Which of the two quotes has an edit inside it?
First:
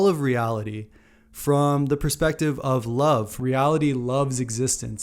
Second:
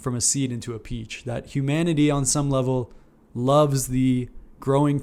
first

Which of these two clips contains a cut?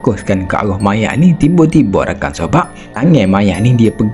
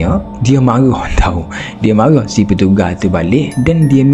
first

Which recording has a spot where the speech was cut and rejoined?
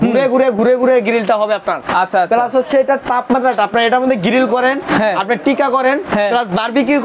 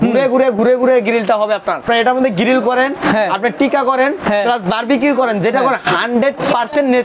second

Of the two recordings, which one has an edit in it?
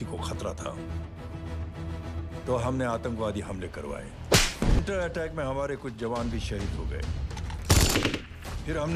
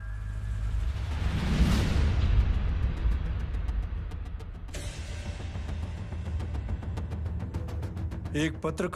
first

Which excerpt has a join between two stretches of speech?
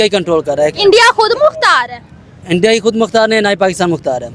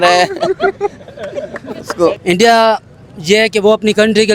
second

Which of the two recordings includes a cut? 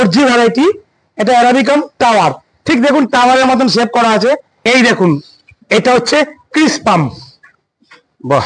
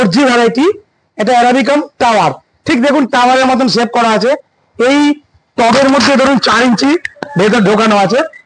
first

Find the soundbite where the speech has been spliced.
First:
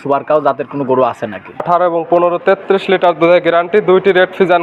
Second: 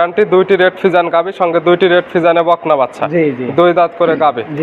first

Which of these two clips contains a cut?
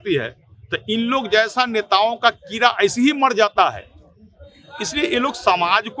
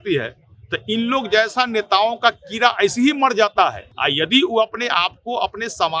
second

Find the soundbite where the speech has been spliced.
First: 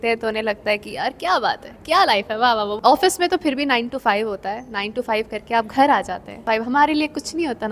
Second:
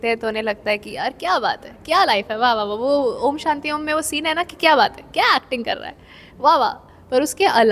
first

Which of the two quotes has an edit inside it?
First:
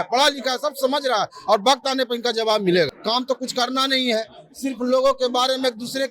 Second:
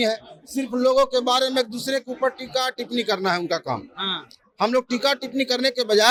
first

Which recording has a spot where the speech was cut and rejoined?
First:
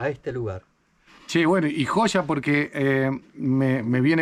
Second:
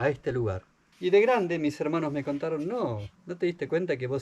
second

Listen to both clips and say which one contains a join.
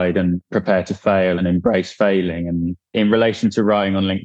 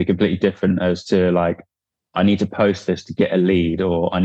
first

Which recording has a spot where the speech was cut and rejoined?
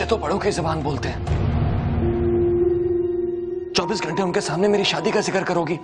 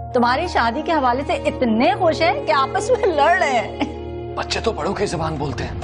first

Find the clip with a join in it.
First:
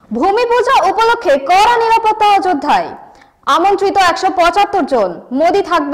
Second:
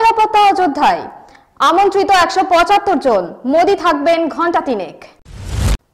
second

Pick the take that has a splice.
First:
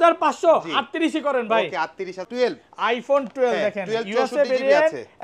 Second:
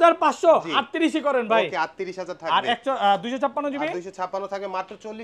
first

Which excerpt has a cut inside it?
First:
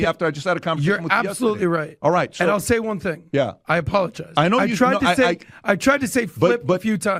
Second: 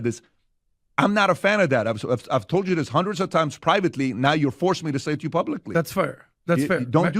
second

